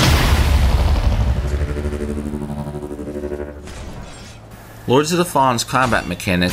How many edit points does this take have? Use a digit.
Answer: 1